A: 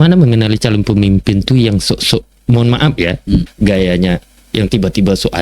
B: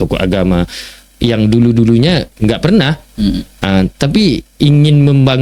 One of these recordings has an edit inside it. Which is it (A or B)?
A